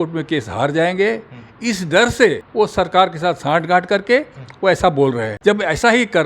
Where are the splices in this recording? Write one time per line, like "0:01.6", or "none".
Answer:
0:02.4
0:05.3